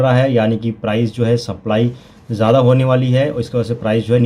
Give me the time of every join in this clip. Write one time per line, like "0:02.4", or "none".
none